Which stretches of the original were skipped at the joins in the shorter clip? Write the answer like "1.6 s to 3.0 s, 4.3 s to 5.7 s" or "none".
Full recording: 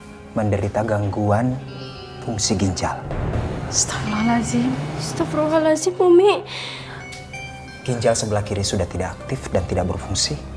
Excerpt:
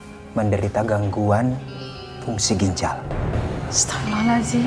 none

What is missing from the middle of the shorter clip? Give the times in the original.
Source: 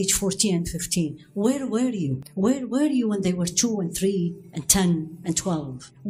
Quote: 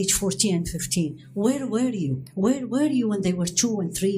none

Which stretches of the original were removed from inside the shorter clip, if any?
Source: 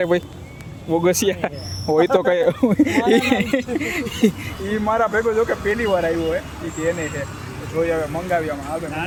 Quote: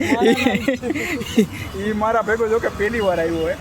none

